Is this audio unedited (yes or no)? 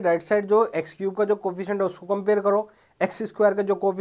yes